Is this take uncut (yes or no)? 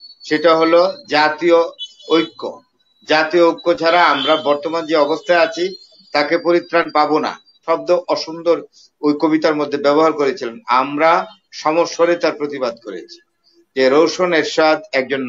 no